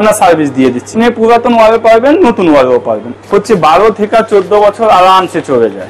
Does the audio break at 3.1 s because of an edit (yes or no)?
yes